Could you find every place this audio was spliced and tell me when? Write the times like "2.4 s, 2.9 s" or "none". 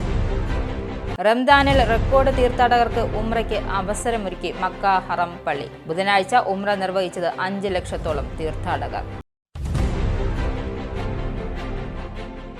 none